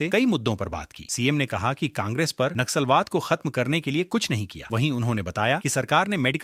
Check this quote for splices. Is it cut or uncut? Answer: uncut